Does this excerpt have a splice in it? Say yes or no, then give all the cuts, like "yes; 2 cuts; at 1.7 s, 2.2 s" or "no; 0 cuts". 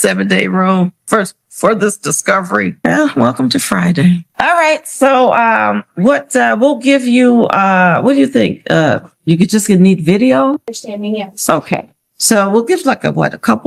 no; 0 cuts